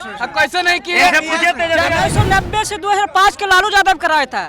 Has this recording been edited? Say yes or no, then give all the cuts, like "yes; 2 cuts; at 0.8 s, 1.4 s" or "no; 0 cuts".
yes; 1 cut; at 2.0 s